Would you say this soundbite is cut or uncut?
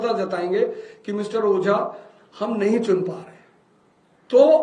uncut